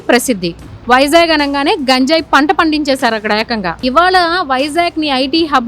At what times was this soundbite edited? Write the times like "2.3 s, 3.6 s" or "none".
3.8 s